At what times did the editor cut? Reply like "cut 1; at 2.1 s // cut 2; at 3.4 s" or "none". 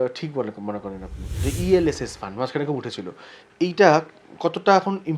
cut 1; at 1.5 s

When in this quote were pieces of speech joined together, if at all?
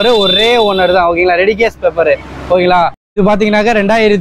cut 1; at 3.0 s

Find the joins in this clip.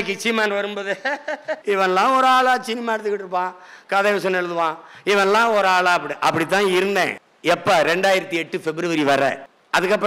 cut 1; at 1.6 s // cut 2; at 7.2 s

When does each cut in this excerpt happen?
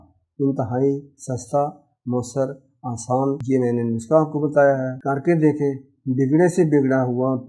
cut 1; at 3.4 s // cut 2; at 4.9 s

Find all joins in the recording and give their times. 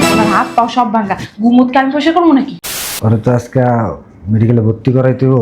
cut 1; at 2.7 s

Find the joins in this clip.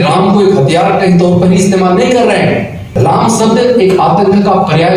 cut 1; at 2.8 s

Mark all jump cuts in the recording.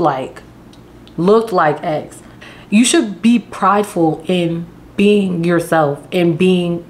cut 1; at 2.3 s

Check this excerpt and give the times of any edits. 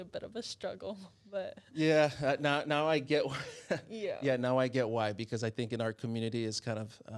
none

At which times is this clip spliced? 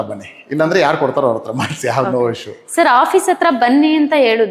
none

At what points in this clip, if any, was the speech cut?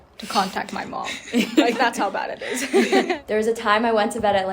cut 1; at 3.1 s

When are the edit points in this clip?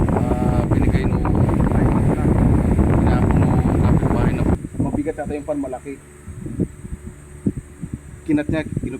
cut 1; at 4.5 s

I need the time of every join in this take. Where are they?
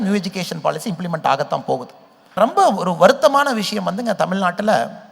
cut 1; at 2.4 s

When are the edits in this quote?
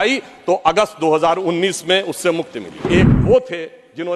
cut 1; at 2.8 s

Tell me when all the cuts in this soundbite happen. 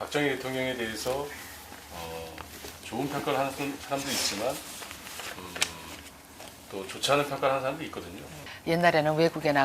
cut 1; at 7.4 s

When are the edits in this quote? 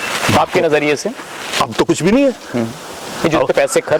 none

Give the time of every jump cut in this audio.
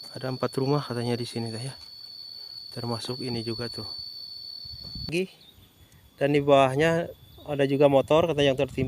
cut 1; at 5.1 s

